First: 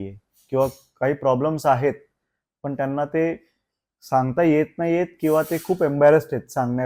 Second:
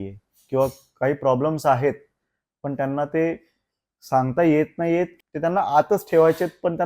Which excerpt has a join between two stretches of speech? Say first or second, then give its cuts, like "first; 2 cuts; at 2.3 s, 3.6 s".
second; 1 cut; at 5.1 s